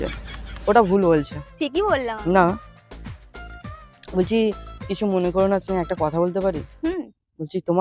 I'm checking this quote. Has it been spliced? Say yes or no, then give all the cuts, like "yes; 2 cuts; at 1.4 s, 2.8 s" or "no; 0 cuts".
no; 0 cuts